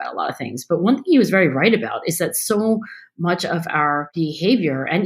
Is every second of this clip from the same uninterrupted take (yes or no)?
no